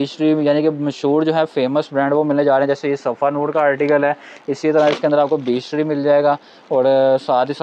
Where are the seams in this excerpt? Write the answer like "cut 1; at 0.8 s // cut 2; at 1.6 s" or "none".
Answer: none